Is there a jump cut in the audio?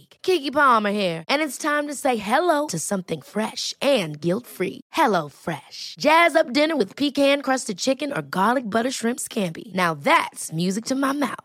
no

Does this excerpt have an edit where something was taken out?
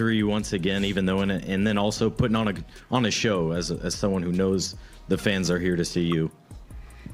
yes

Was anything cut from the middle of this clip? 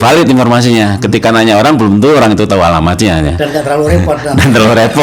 no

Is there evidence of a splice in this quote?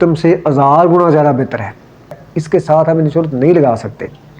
yes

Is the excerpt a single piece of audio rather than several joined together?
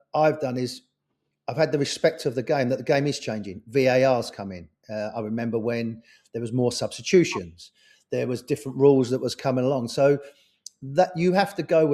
yes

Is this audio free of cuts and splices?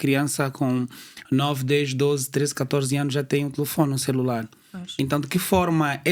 yes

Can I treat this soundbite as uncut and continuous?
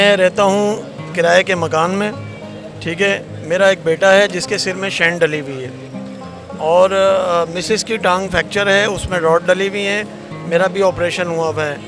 yes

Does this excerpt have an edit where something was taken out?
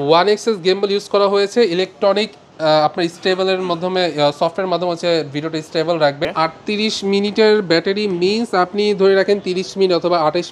yes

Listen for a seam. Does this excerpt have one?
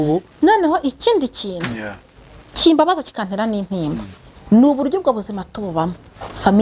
no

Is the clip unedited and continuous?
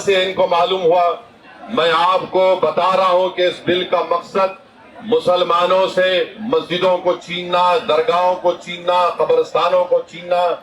no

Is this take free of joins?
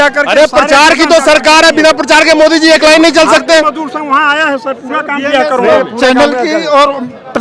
yes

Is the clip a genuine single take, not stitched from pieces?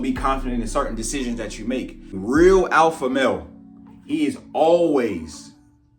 no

